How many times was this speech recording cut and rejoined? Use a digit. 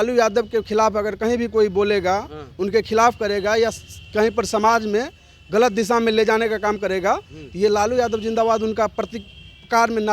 0